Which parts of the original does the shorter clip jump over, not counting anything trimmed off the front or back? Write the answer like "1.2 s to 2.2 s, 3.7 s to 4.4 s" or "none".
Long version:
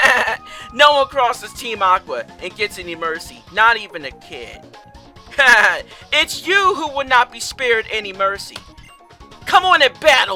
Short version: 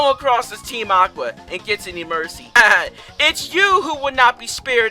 3.5 s to 5.5 s